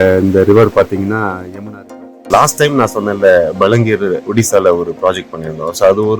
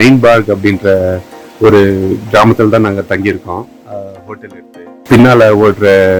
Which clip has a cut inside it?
first; 1 cut; at 2.3 s

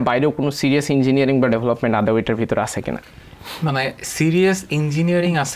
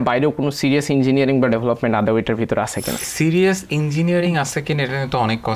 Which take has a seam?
second; 1 cut; at 3.1 s

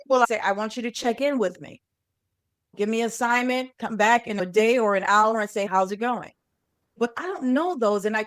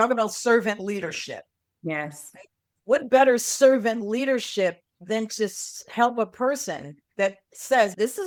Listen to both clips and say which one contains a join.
first; 1 cut; at 4.4 s

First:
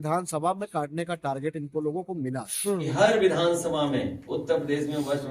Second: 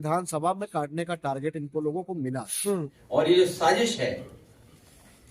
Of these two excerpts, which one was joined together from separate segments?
first; 1 cut; at 2.9 s

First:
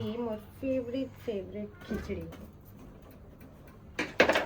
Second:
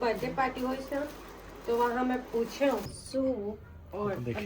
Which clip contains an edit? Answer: second; 1 cut; at 2.9 s

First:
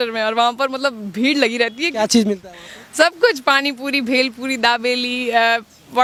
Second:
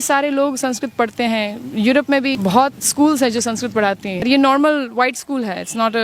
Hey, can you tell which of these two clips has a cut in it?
second; 2 cuts; at 2.4 s, 4.2 s

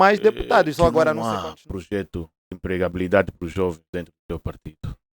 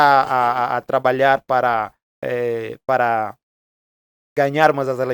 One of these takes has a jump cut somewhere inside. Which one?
first; 1 cut; at 1.2 s

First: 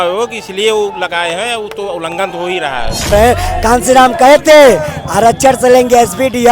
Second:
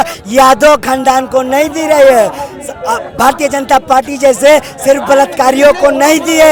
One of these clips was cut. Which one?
first; 1 cut; at 3.1 s

